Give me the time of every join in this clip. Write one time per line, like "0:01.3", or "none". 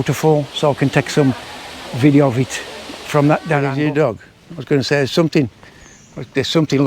0:03.7